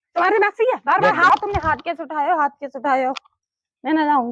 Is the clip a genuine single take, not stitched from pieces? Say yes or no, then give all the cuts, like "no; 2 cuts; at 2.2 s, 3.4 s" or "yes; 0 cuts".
no; 1 cut; at 1.3 s